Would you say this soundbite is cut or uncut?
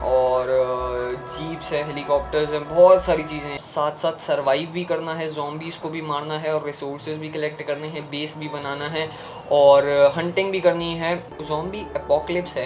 cut